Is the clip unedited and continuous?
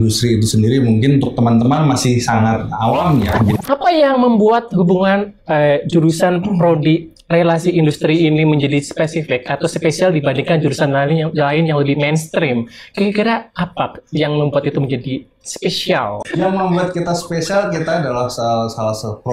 no; 2 cuts; at 3.6 s, 16.2 s

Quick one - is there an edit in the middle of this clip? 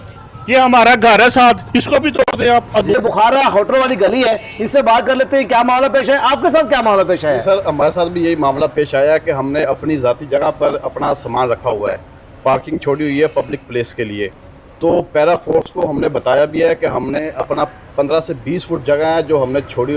yes; 1 cut; at 2.9 s

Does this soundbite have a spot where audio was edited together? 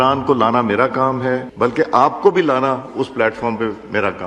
yes; 1 cut; at 1.5 s

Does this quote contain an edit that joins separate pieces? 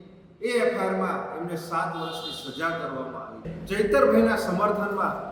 yes; 1 cut; at 3.5 s

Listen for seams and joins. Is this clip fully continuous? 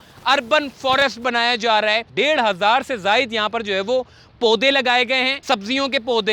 no; 2 cuts; at 2.1 s, 5.4 s

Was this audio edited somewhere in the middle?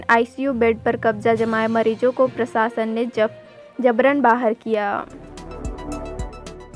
yes; 1 cut; at 5.5 s

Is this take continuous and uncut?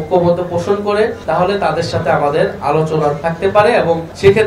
yes; 0 cuts

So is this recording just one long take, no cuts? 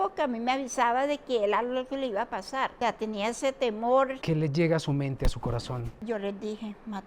no; 3 cuts; at 2.7 s, 4.2 s, 6.0 s

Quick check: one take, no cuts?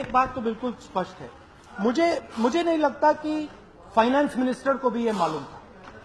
yes; 0 cuts

